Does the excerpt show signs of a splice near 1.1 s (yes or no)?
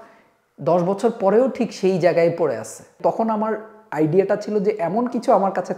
no